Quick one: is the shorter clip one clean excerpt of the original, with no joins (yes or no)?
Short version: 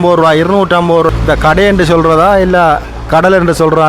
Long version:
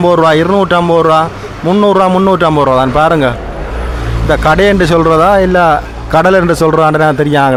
no